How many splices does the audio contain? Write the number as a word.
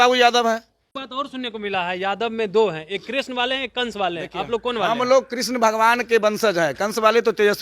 one